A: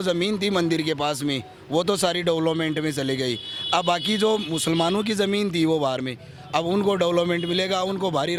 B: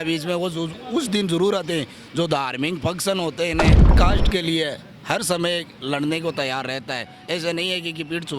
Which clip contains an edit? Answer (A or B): B